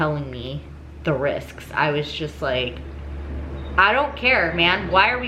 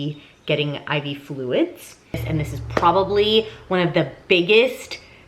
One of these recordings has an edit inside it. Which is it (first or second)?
second